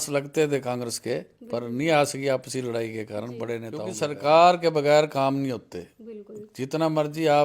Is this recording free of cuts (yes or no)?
no